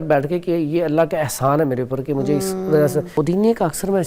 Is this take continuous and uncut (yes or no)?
no